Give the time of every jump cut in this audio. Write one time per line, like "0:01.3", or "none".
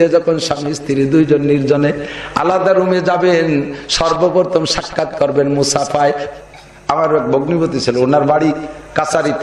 0:06.2